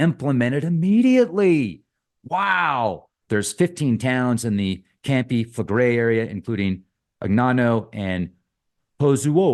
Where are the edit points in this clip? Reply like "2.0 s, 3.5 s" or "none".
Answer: 3.1 s